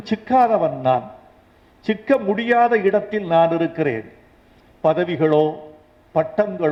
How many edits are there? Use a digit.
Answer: 0